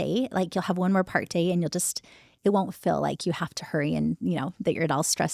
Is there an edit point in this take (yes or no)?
no